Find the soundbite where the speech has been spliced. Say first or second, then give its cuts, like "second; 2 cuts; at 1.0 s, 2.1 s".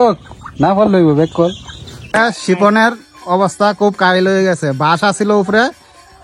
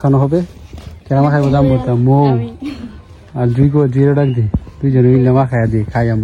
first; 1 cut; at 2.1 s